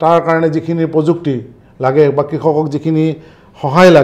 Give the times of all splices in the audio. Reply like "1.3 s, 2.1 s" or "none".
none